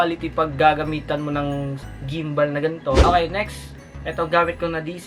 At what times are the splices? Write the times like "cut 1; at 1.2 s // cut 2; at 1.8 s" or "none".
cut 1; at 3.0 s